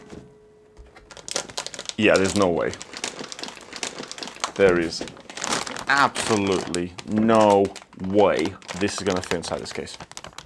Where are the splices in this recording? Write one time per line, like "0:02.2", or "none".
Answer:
0:01.2